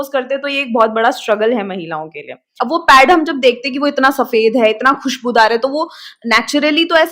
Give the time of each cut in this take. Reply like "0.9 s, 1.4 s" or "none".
2.5 s

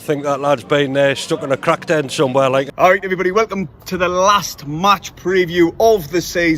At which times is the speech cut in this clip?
2.7 s

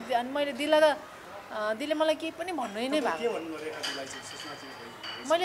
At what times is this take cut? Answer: none

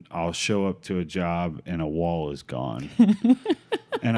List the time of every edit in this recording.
none

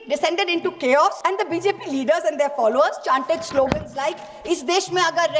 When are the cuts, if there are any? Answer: 1.2 s

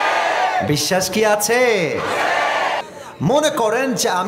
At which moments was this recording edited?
2.8 s

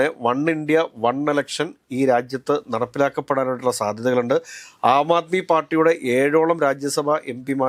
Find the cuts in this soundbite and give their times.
none

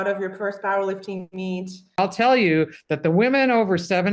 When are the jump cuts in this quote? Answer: 2.0 s

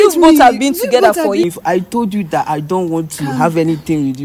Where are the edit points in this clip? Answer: 1.4 s

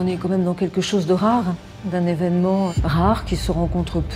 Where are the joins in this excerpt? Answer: 1.7 s, 2.8 s

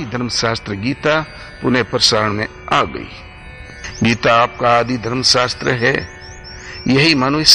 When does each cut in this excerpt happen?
none

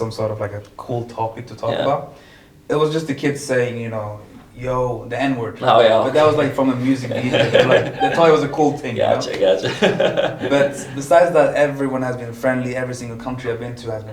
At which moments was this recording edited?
none

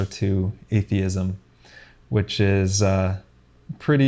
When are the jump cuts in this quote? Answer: none

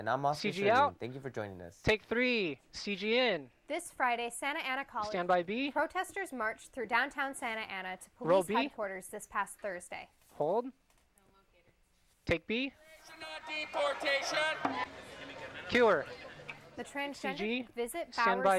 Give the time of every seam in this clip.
5.1 s, 17.3 s

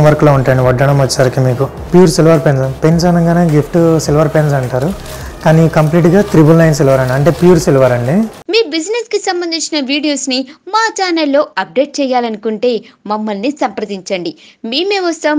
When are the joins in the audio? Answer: 1.9 s, 8.4 s

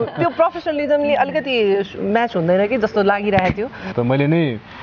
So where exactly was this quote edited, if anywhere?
3.9 s

